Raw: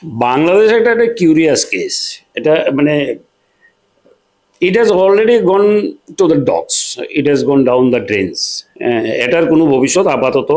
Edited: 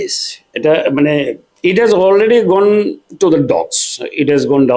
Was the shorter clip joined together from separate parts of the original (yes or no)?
yes